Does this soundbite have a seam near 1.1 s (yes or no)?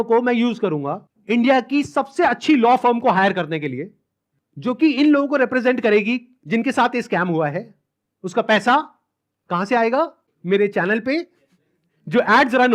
yes